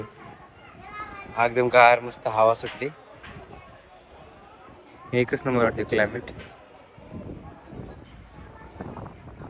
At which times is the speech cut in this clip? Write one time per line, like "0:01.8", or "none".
none